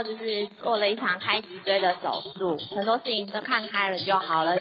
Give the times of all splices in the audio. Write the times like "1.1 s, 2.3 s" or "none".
2.7 s